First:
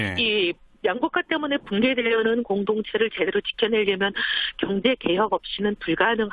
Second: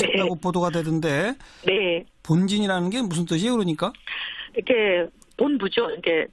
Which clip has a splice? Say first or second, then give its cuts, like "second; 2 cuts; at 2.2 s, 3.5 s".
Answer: second; 1 cut; at 1.2 s